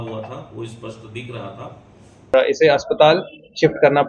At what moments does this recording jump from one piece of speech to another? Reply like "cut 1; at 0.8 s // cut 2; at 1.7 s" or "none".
cut 1; at 2.3 s